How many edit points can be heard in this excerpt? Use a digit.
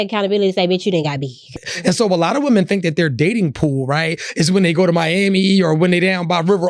1